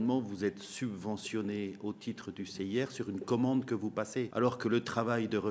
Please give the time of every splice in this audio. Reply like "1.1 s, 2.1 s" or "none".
4.3 s